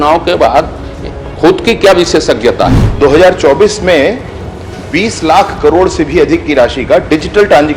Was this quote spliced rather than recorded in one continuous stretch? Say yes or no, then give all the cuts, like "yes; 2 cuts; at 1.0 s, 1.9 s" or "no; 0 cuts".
yes; 1 cut; at 2.8 s